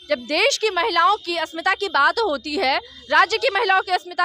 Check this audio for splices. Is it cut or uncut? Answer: uncut